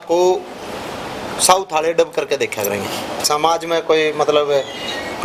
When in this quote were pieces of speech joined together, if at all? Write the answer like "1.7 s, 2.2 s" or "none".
3.2 s